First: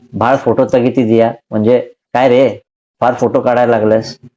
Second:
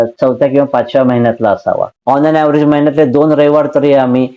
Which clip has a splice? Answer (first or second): second